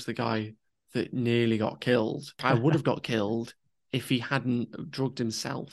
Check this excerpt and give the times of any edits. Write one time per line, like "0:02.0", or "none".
0:02.3